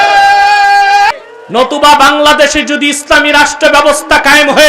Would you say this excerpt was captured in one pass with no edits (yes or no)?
no